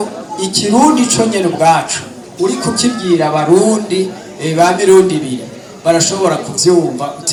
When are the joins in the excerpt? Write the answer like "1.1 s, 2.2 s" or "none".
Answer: none